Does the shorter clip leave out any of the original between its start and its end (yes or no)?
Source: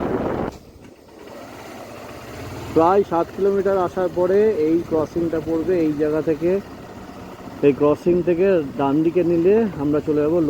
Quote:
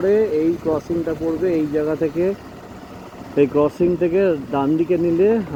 no